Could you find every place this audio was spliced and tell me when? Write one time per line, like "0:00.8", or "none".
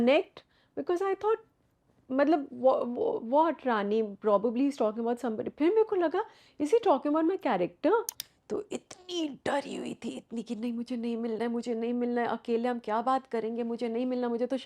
0:08.3

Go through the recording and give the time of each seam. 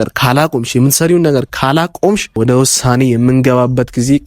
0:02.4

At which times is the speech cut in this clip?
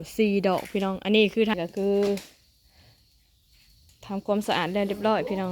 0:01.6

